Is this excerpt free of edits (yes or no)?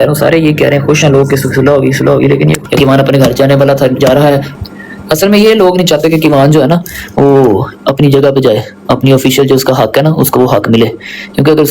no